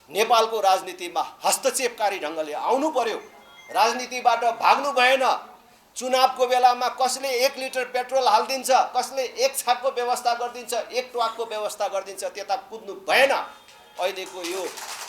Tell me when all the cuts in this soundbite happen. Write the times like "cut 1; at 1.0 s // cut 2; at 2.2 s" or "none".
none